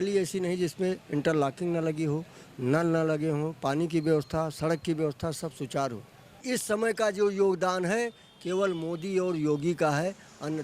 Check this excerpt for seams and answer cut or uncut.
cut